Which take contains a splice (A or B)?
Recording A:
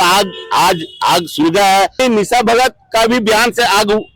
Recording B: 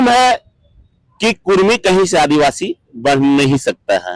A